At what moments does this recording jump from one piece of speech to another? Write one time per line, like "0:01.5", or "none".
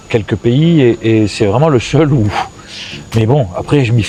none